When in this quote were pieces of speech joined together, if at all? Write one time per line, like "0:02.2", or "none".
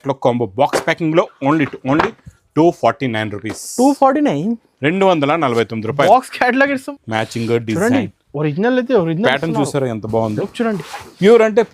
0:06.8